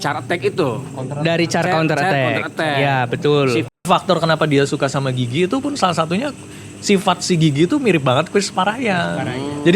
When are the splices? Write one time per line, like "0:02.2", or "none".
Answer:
0:03.9